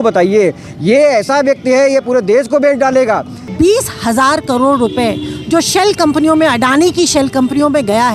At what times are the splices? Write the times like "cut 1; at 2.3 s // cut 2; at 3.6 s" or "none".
cut 1; at 3.4 s